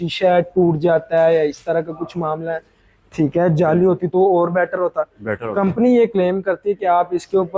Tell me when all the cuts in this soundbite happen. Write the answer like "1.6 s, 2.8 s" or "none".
none